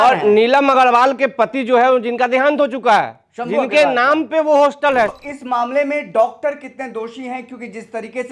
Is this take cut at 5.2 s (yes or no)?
yes